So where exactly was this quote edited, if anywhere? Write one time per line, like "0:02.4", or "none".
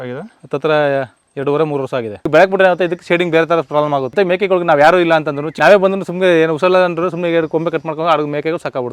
0:02.2
0:04.1
0:05.4